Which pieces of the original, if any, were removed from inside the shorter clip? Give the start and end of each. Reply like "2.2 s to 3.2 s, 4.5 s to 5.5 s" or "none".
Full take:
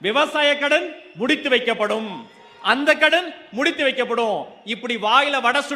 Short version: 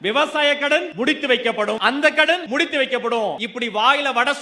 0.9 s to 1.1 s, 2.0 s to 2.6 s, 3.3 s to 3.5 s, 4.5 s to 4.7 s